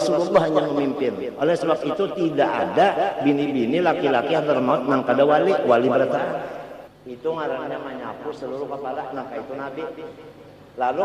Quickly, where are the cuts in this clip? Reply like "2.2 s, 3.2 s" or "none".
6.9 s